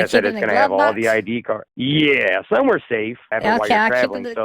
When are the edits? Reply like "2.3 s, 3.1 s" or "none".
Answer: 3.2 s